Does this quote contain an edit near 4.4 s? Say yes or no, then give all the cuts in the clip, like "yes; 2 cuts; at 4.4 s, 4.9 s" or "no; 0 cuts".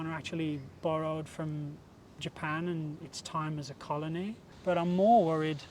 yes; 1 cut; at 4.4 s